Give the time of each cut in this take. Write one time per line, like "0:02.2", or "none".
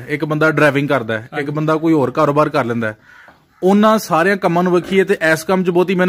none